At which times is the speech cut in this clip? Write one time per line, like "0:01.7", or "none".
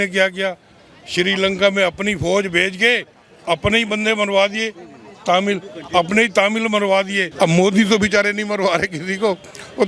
0:07.2